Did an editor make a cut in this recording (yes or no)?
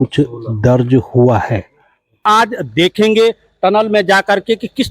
yes